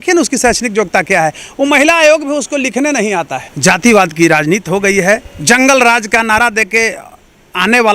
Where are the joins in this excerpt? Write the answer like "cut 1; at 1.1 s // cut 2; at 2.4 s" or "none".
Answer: cut 1; at 3.4 s // cut 2; at 5.3 s